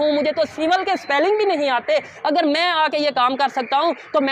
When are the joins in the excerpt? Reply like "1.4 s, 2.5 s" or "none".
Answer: 2.1 s